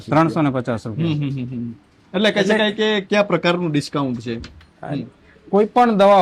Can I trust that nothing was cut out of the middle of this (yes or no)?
yes